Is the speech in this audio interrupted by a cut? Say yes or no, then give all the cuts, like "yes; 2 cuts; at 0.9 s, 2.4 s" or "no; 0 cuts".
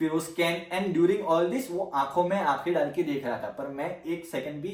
no; 0 cuts